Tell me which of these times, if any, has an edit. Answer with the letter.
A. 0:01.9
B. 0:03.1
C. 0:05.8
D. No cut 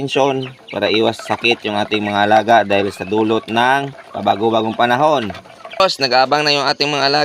C